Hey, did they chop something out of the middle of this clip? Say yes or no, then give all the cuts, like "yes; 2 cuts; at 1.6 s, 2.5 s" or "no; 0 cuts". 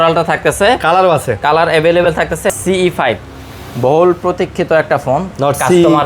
yes; 1 cut; at 2.5 s